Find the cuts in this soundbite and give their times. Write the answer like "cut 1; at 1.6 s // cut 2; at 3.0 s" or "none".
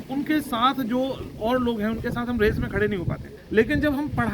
cut 1; at 3.3 s